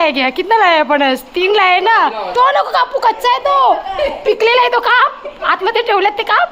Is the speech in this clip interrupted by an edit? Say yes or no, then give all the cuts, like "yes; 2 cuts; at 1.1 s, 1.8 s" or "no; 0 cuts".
yes; 1 cut; at 2.2 s